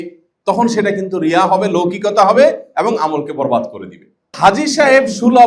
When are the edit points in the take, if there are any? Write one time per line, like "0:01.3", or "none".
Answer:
0:04.3